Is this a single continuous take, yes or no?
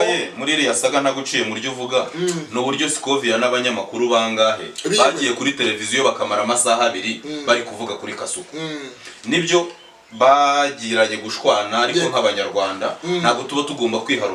yes